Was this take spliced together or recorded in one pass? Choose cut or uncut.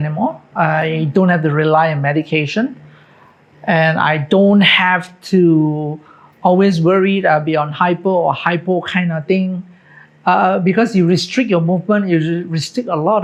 uncut